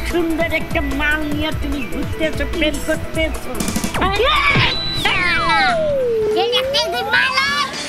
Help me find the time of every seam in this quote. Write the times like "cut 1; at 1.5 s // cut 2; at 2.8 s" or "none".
none